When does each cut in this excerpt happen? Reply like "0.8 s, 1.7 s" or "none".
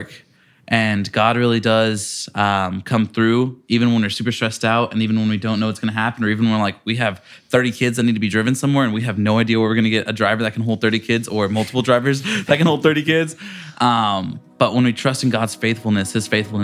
none